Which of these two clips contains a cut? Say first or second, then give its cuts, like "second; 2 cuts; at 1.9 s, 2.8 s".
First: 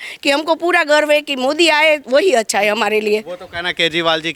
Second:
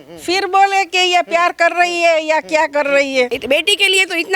second; 1 cut; at 3.4 s